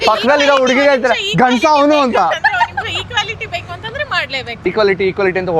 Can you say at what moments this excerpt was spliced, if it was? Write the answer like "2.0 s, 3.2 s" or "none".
4.6 s